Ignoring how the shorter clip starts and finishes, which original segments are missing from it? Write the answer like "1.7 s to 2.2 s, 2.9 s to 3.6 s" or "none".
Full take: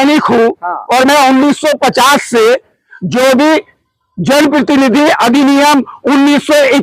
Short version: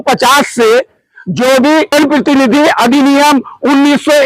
3.7 s to 4.3 s